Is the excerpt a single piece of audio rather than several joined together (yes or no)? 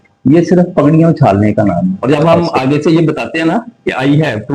no